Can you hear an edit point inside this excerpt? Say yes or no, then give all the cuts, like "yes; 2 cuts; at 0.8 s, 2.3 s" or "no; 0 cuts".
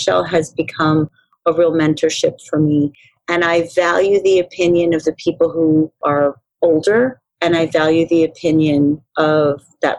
no; 0 cuts